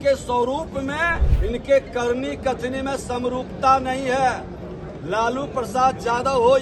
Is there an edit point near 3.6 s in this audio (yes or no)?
no